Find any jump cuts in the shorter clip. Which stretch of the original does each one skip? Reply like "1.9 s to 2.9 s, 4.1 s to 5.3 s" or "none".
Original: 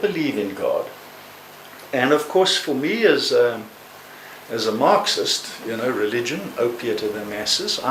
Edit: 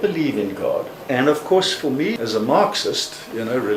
1.0 s to 1.8 s, 3.0 s to 4.4 s